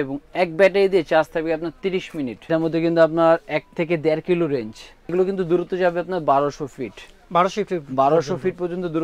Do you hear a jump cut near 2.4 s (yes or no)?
yes